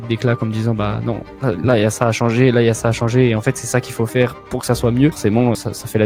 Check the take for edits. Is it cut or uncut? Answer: uncut